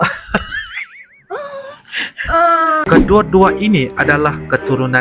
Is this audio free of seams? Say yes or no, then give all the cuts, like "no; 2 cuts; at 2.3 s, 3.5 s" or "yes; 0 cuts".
no; 1 cut; at 2.8 s